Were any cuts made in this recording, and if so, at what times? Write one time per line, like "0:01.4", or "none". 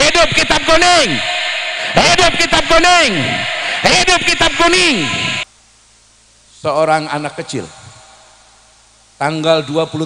0:05.4

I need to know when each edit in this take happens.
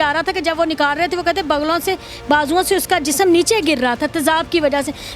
none

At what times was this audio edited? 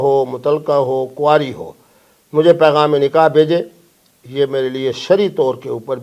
none

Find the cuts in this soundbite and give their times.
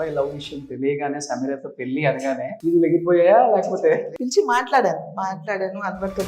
0:02.6
0:04.2

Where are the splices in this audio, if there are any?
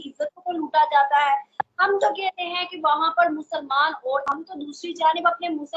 0:04.2

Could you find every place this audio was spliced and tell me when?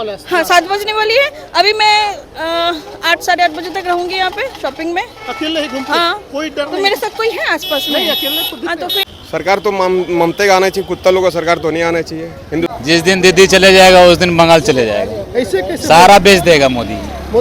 0:09.0
0:12.7

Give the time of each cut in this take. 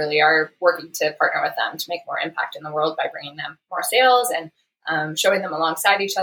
none

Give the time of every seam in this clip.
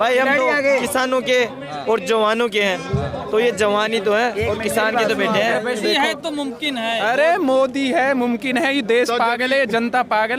0:05.8

